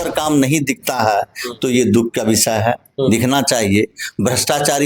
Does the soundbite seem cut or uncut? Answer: uncut